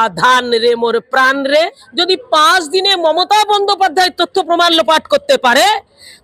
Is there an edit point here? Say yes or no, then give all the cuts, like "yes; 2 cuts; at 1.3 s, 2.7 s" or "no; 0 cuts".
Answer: yes; 1 cut; at 1.9 s